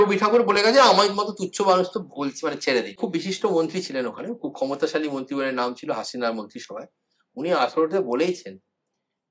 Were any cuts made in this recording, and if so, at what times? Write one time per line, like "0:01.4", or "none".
0:03.0